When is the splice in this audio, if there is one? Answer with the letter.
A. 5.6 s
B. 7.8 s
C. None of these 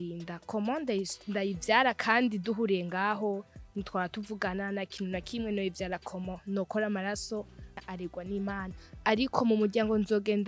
B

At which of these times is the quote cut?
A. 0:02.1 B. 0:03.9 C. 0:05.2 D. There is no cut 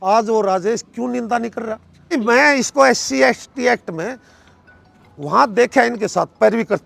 A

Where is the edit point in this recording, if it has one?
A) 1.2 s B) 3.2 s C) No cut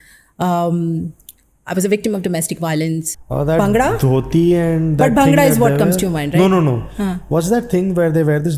B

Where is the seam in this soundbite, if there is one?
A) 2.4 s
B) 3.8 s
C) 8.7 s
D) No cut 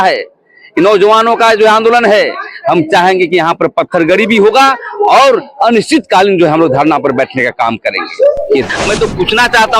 C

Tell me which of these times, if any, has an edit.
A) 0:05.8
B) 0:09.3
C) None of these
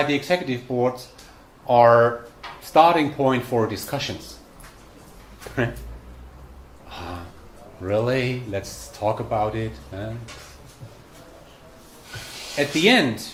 C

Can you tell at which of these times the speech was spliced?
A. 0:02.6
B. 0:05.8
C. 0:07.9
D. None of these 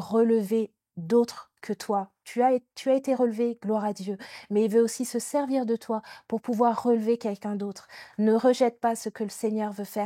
D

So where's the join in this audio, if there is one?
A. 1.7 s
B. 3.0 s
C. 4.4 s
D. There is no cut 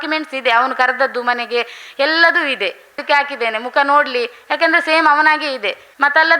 B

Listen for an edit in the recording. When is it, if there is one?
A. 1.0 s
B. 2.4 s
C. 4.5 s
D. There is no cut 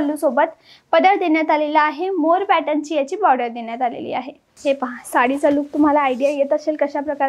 C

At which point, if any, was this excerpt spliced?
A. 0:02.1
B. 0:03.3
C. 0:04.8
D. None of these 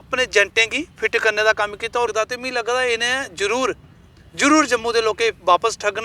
A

